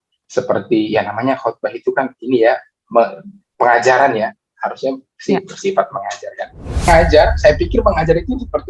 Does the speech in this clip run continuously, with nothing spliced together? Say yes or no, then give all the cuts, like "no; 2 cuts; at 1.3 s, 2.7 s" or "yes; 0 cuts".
no; 1 cut; at 6.9 s